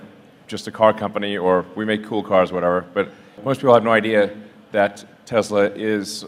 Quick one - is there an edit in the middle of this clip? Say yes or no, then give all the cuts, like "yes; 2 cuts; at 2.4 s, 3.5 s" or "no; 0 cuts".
no; 0 cuts